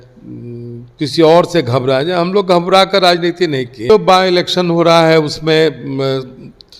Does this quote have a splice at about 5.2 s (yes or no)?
no